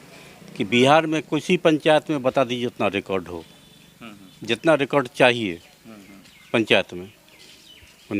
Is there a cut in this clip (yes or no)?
no